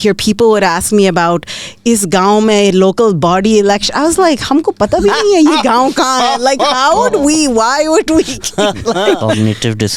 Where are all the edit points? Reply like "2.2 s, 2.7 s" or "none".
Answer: 9.0 s